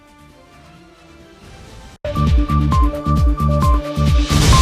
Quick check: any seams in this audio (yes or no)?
yes